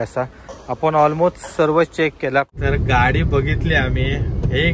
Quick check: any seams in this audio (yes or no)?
yes